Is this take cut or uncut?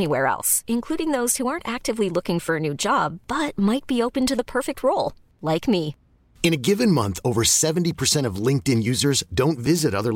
uncut